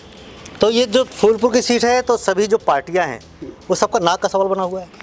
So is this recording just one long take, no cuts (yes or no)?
yes